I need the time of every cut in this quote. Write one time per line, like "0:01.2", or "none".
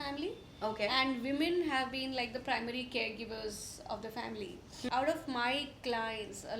0:04.7